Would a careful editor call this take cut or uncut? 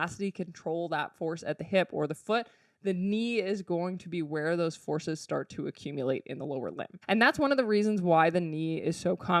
cut